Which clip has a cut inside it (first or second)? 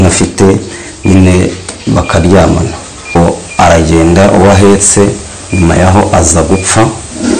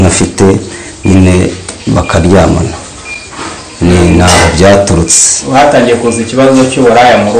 first